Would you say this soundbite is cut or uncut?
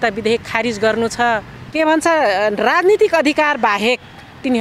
cut